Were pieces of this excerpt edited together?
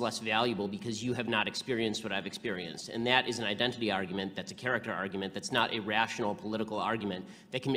no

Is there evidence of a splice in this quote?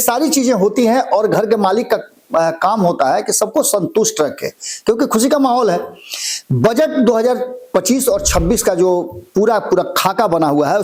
no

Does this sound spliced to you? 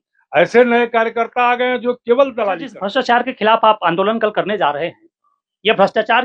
yes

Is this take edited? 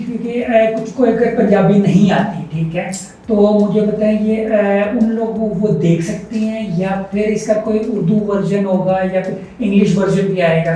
no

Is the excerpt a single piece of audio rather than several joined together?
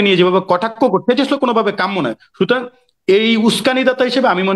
yes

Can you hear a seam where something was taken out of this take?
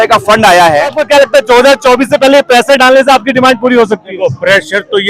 yes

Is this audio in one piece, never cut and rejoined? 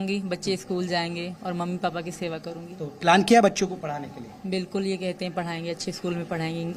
yes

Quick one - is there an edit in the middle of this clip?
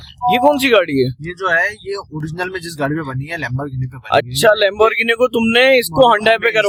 no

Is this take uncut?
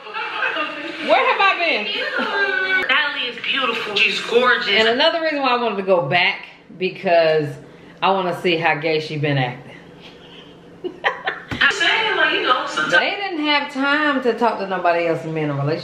no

